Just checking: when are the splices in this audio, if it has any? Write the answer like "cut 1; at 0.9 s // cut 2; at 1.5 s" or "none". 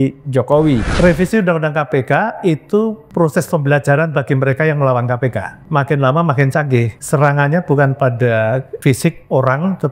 cut 1; at 0.9 s // cut 2; at 3.0 s // cut 3; at 5.5 s // cut 4; at 7.0 s // cut 5; at 8.7 s